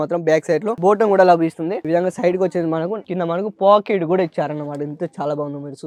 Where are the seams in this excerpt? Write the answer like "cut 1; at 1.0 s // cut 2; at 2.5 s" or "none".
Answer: none